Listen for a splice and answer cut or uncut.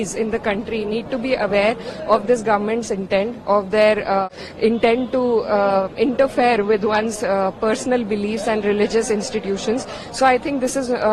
cut